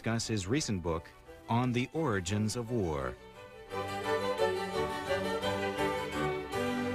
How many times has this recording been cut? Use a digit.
0